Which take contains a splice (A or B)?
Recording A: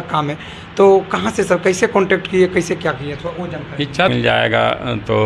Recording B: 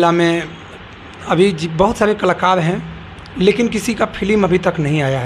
A